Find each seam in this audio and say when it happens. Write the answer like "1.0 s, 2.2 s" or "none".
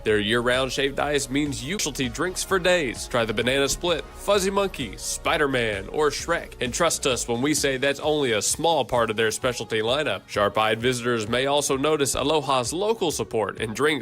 1.8 s